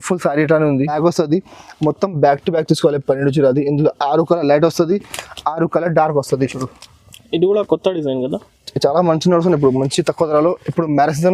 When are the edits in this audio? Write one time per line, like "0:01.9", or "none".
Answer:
0:01.0